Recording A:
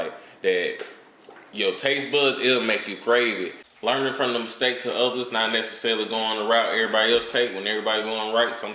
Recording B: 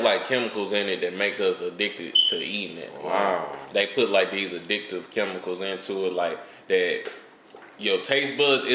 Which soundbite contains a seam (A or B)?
A